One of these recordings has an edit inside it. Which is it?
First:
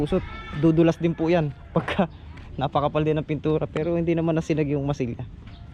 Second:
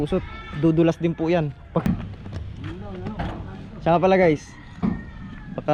second; 1 cut; at 1.8 s

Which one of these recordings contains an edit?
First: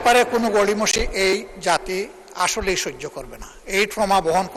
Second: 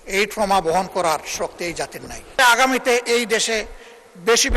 second; 1 cut; at 2.4 s

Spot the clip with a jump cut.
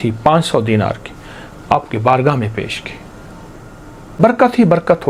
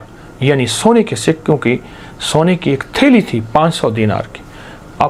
first; 1 cut; at 4.2 s

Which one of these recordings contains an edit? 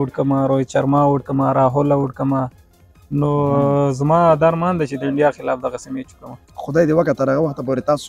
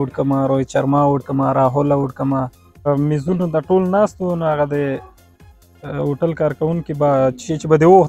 second; 1 cut; at 2.9 s

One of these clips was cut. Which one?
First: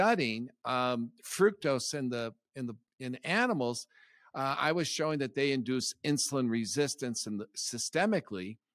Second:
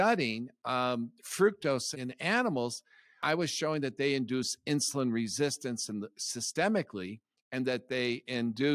second; 2 cuts; at 1.9 s, 3.2 s

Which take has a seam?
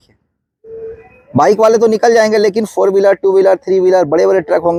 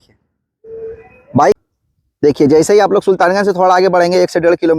second; 1 cut; at 1.5 s

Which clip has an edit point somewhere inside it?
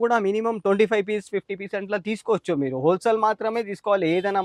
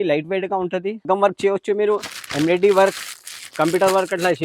second; 1 cut; at 1.0 s

